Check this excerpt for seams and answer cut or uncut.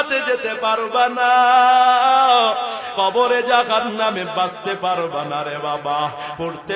cut